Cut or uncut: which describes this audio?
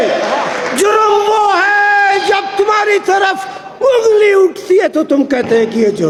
uncut